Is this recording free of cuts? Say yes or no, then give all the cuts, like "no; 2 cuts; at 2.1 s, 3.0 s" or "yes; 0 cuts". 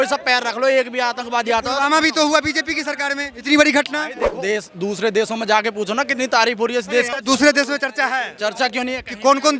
no; 2 cuts; at 4.3 s, 7.1 s